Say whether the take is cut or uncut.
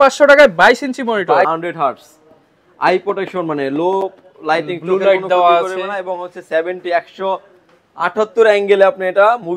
cut